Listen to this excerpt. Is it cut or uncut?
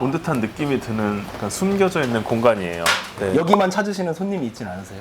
cut